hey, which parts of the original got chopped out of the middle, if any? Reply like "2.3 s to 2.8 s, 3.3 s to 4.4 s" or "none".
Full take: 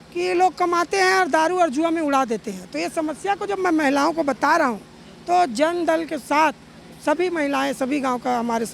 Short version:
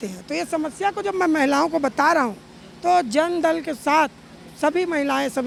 none